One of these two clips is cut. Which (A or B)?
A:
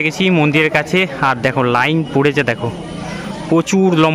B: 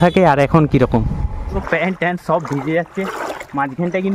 B